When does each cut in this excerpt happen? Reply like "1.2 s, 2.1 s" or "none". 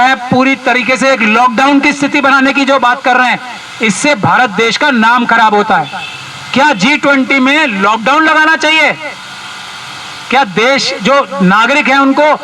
none